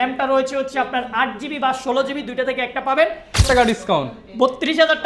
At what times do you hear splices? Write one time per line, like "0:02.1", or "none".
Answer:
0:03.4